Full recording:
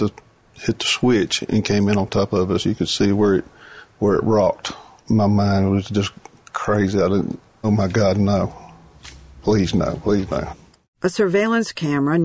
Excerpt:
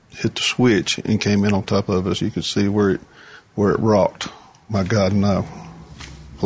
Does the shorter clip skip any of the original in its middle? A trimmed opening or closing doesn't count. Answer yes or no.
yes